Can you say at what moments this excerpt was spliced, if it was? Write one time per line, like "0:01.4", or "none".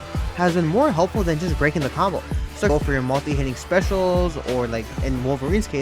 0:02.7